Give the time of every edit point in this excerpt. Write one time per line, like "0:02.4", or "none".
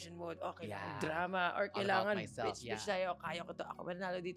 none